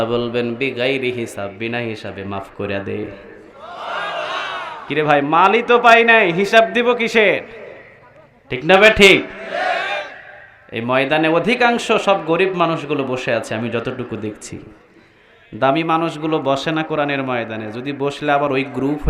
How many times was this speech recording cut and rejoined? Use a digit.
0